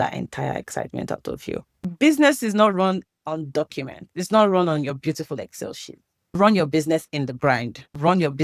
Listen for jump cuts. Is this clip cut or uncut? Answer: cut